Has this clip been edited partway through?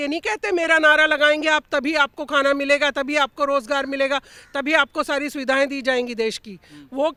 no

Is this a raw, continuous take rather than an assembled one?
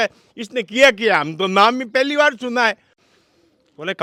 yes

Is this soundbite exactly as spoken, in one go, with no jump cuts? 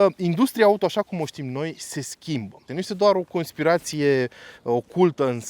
no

